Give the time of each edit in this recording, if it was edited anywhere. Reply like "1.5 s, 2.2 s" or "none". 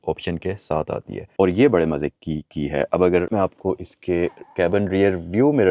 1.3 s